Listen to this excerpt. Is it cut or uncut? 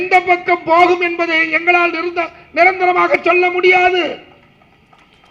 uncut